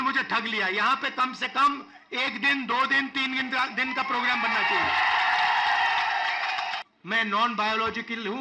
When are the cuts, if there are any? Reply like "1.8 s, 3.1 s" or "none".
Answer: 6.8 s